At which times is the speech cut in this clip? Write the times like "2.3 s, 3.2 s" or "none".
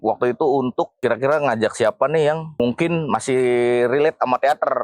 0.9 s, 2.6 s